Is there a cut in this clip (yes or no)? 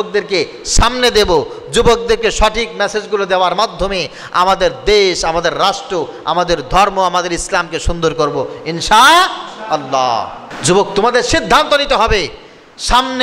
yes